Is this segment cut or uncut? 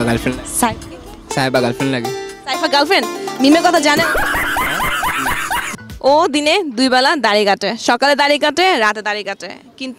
cut